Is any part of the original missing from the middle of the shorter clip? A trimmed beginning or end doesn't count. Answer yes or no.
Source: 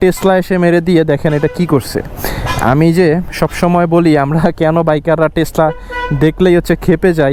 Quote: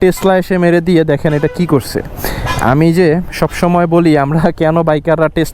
no